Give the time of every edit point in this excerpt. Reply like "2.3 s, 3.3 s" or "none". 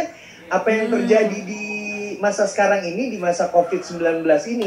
none

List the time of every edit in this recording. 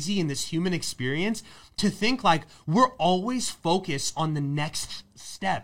none

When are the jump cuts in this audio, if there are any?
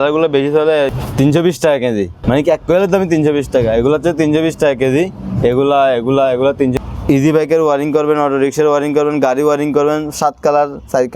1.0 s, 2.1 s, 6.7 s

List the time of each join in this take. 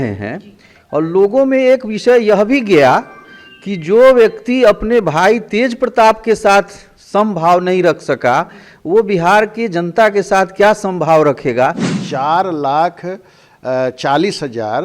11.9 s

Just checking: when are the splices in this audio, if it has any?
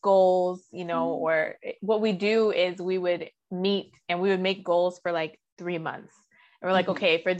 none

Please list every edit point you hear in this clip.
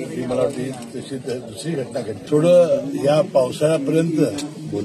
2.2 s

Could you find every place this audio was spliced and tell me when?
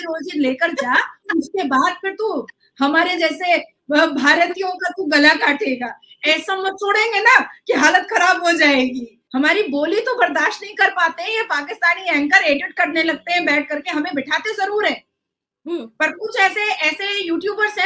none

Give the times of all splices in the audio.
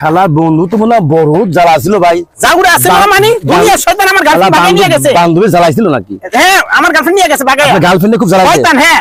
none

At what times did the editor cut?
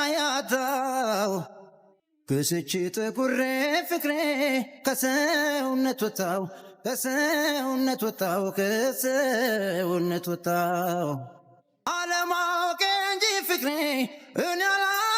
none

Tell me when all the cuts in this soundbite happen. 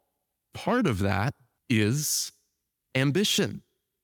1.5 s

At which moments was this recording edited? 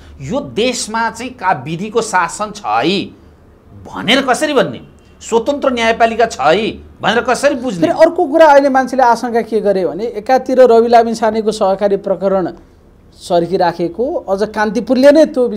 none

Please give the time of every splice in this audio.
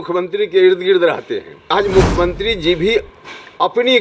1.7 s

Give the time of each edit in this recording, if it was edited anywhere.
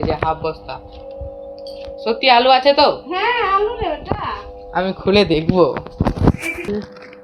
none

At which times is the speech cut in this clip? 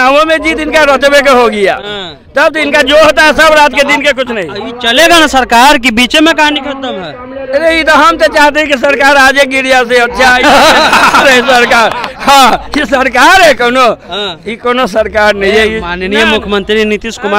none

